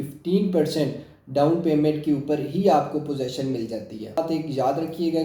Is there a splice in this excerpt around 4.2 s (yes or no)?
yes